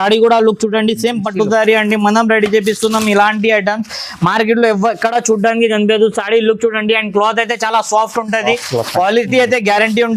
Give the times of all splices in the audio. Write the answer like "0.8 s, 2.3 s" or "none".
none